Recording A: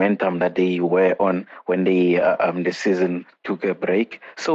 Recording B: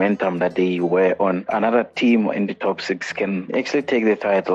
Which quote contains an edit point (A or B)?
B